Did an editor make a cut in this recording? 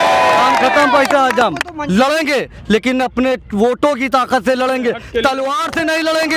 yes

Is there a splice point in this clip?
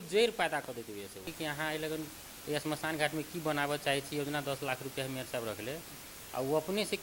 yes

